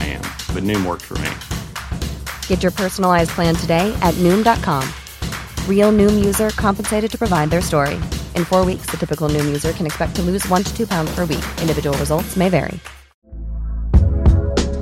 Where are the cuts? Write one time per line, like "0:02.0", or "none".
0:13.2